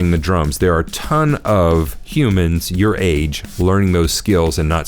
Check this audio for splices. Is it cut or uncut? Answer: uncut